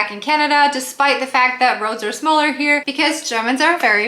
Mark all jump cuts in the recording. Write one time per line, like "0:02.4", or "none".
0:02.9